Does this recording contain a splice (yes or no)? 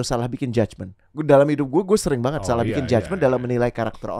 no